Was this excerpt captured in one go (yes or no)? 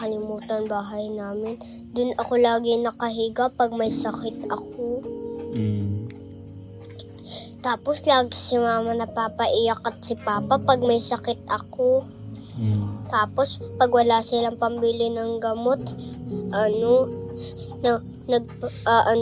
yes